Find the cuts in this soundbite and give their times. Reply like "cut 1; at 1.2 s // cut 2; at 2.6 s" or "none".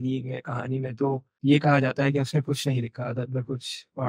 cut 1; at 1.3 s